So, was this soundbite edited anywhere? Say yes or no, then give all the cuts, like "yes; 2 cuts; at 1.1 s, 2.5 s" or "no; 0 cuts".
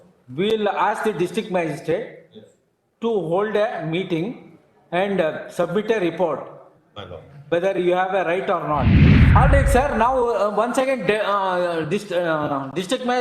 yes; 1 cut; at 9.1 s